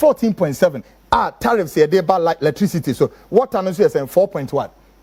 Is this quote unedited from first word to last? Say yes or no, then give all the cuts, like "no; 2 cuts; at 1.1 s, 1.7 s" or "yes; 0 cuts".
yes; 0 cuts